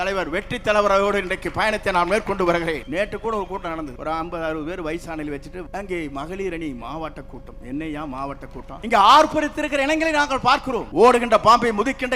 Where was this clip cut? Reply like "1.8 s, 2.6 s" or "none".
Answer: 2.8 s, 3.9 s, 5.7 s, 8.7 s, 10.9 s